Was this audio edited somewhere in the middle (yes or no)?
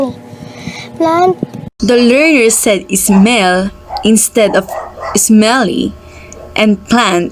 no